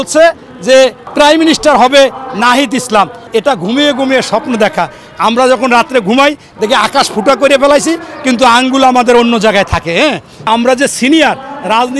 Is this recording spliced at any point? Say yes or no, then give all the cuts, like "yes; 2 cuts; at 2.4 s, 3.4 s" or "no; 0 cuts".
yes; 3 cuts; at 1.0 s, 3.2 s, 10.5 s